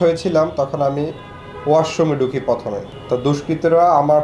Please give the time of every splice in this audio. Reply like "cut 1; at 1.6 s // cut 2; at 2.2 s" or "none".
cut 1; at 2.9 s